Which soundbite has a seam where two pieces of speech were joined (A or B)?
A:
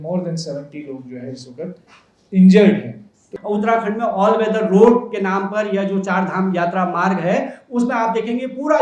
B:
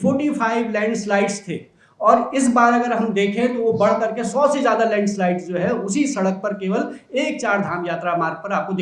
A